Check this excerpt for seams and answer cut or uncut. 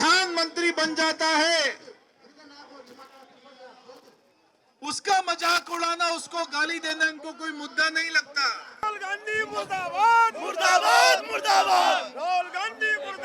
cut